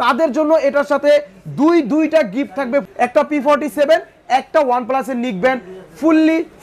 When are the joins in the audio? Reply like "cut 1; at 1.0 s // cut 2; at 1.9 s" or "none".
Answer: cut 1; at 2.9 s